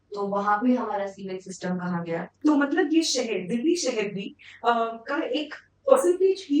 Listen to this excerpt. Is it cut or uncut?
cut